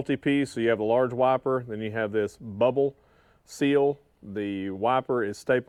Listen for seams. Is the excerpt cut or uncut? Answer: uncut